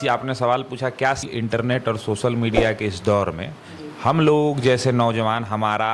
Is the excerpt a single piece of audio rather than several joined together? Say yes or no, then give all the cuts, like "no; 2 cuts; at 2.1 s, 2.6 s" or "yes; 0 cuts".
no; 1 cut; at 1.3 s